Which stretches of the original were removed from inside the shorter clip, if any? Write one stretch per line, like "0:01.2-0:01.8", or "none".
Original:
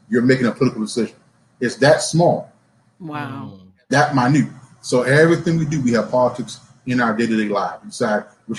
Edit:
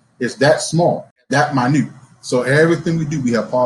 0:02.5-0:03.7